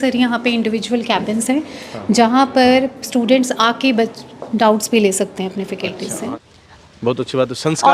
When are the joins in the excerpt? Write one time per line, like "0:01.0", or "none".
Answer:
0:06.3

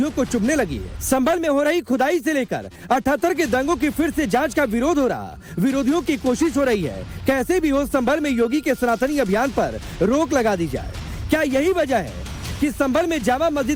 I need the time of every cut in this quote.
none

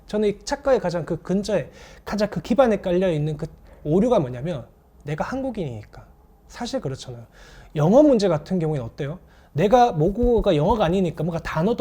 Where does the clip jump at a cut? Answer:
none

